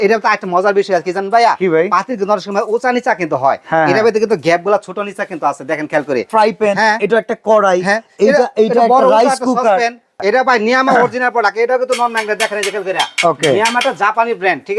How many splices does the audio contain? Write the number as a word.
two